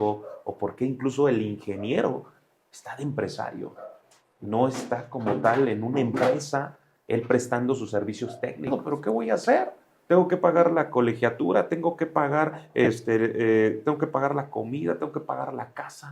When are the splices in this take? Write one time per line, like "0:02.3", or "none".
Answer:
0:08.7